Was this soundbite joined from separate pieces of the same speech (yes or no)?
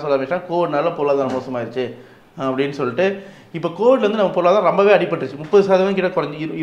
no